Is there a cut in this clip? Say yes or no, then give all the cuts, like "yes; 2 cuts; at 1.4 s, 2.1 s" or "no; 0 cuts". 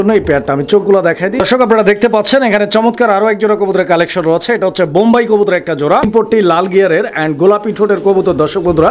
yes; 2 cuts; at 1.4 s, 6.0 s